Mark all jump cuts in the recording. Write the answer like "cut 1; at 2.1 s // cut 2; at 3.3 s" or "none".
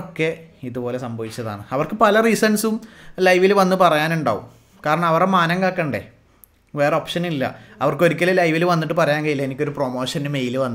none